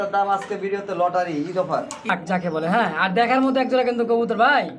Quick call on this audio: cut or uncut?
cut